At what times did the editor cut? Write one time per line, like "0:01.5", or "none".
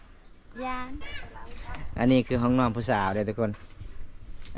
0:01.1

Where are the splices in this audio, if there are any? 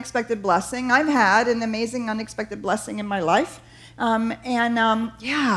none

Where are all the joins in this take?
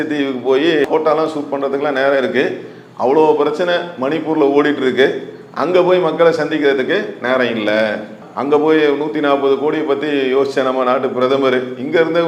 none

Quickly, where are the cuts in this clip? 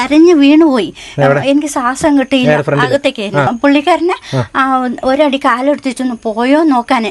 0:03.5

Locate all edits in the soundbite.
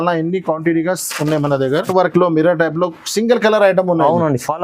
0:01.9

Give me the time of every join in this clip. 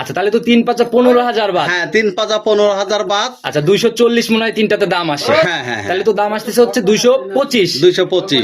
none

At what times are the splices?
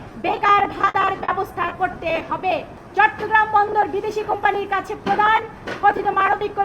0:02.8

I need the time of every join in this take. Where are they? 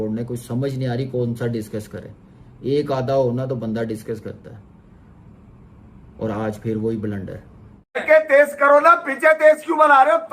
0:08.0

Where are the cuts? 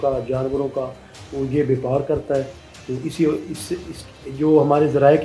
none

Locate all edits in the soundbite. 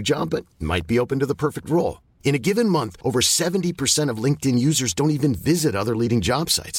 none

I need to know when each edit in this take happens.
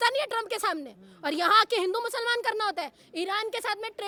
none

